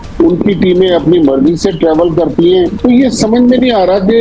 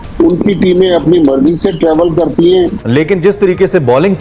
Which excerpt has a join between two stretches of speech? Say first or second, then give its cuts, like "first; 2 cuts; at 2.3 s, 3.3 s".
second; 1 cut; at 2.7 s